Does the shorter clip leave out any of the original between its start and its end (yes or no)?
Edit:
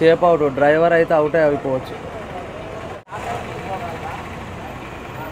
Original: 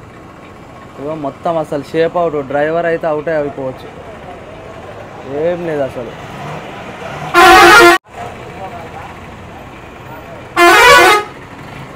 yes